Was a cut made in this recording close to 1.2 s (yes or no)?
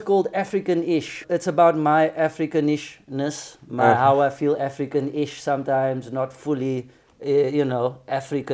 yes